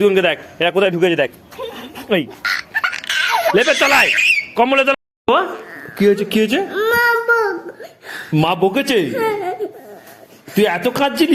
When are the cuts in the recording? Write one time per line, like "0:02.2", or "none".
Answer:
0:04.9